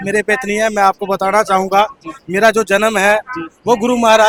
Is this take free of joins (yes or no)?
yes